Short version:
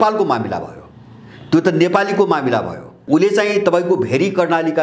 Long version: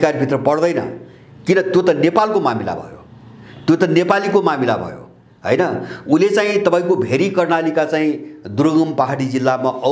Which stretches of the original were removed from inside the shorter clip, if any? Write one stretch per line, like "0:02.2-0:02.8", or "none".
0:05.1-0:05.9